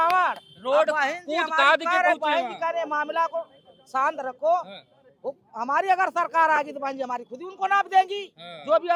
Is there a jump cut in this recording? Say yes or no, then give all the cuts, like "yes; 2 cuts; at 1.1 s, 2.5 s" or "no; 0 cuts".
no; 0 cuts